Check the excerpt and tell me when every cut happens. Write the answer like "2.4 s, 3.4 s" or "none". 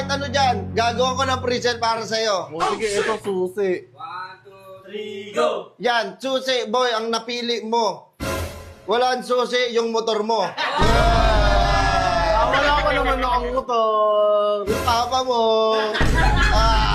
none

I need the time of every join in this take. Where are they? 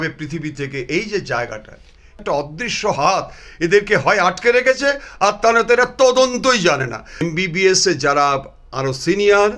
2.2 s, 7.2 s

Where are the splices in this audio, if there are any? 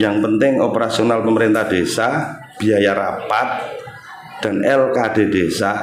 none

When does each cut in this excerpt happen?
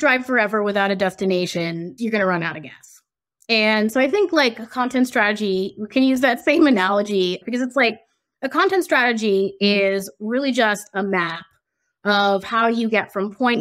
1.9 s, 7.4 s

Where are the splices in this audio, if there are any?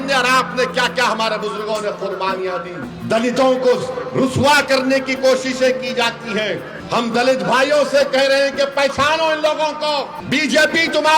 2.9 s, 6.7 s, 10.2 s

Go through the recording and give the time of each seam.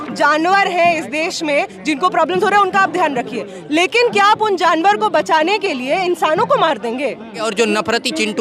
7.4 s

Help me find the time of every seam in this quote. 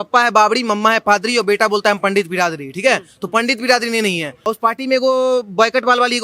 4.5 s

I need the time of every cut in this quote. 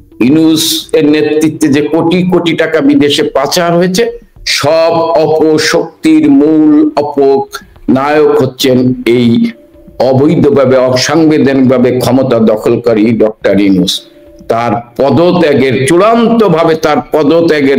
none

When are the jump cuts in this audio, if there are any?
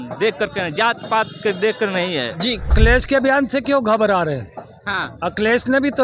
2.7 s

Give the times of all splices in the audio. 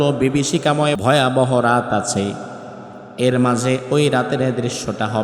1.0 s

